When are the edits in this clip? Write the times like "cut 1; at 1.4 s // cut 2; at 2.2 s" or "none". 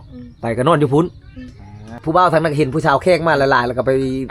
cut 1; at 2.0 s